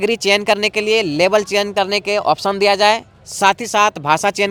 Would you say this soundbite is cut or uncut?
uncut